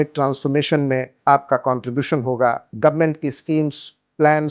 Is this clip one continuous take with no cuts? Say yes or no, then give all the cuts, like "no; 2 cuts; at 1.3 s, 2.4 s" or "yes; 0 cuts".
no; 2 cuts; at 1.1 s, 2.7 s